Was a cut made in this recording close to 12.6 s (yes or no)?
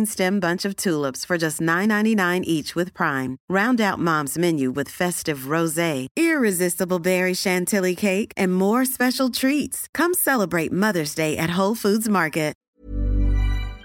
yes